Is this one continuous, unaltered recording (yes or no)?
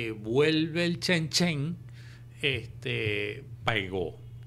yes